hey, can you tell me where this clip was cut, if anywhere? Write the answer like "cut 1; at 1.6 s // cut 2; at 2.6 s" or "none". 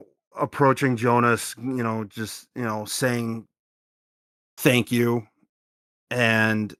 none